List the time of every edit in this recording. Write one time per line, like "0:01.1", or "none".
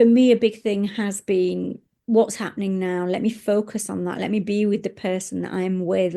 0:01.9